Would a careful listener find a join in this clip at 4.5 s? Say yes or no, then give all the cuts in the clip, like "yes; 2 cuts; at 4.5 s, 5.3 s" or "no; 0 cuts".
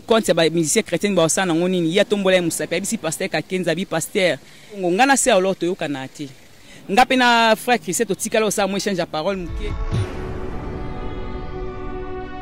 yes; 1 cut; at 4.5 s